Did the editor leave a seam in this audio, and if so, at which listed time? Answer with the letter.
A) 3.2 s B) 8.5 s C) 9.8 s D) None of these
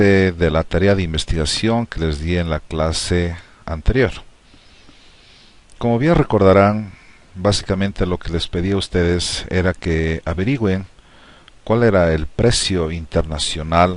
C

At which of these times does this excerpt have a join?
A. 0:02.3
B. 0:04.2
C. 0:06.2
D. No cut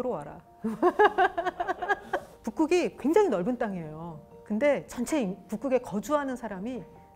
D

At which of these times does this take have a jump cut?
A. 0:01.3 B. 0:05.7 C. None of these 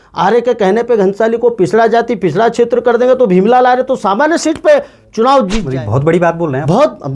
B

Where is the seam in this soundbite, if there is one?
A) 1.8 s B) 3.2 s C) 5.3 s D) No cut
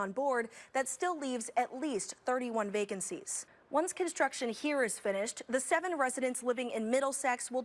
D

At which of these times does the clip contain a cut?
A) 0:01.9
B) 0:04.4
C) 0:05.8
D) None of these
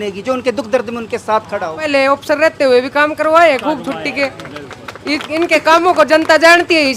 A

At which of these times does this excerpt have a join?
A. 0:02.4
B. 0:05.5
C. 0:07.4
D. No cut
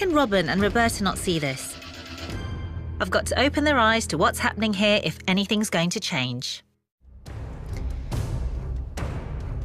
A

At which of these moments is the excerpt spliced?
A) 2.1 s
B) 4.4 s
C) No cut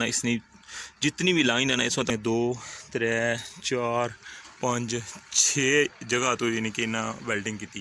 A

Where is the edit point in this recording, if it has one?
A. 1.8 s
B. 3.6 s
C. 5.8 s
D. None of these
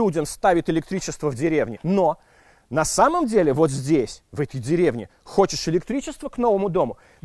A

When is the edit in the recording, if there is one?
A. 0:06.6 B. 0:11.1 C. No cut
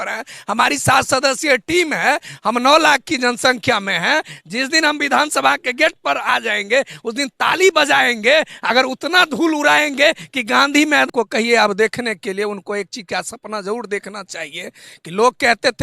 B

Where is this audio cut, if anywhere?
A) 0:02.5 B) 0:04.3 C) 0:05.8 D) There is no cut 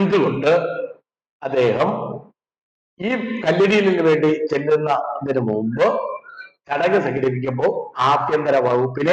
D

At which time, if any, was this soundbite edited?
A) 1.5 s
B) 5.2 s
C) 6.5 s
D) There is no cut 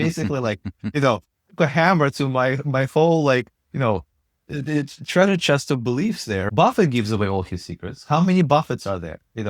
C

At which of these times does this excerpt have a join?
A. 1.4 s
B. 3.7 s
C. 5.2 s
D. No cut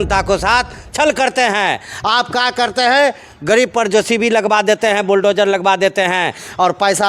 D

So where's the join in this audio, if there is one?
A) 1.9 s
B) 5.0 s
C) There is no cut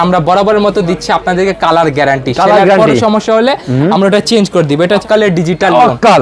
B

